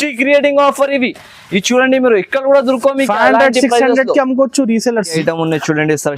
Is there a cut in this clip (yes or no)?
yes